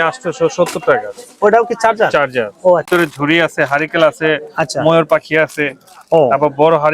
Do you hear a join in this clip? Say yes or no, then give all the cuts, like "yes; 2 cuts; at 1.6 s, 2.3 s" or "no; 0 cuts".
yes; 1 cut; at 2.9 s